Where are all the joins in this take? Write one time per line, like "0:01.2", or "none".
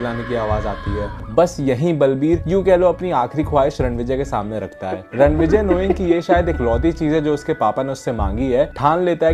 0:01.1
0:05.0

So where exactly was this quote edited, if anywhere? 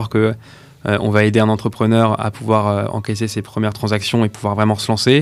none

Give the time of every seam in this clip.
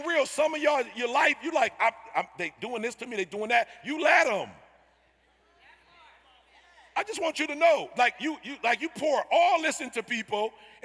none

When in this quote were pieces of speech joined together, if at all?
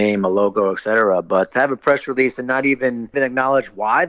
0:01.5
0:03.1

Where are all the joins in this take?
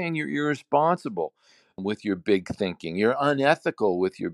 0:01.8

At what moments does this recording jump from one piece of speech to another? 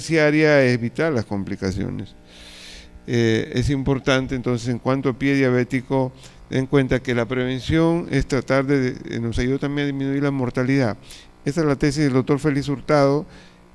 none

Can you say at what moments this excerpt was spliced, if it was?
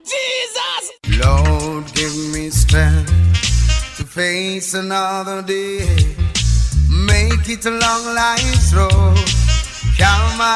0:00.9

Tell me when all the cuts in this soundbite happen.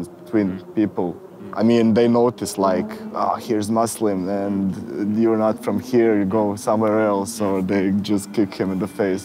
none

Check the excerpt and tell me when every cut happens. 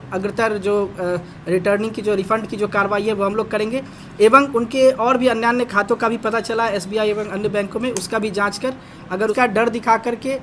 0:09.3

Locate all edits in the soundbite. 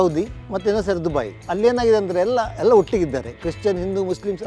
0:01.4

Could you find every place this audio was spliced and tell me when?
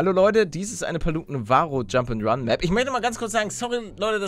none

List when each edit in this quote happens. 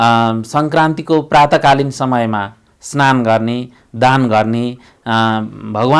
none

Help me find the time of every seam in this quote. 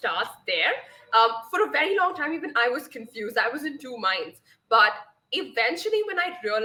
none

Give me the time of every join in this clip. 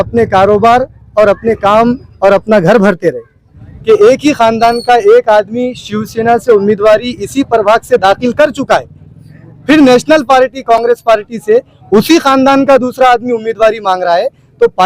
0:03.7

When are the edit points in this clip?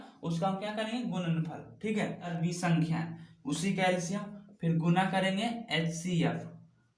0:02.3

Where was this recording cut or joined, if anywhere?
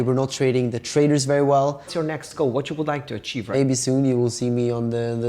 0:01.9
0:03.5

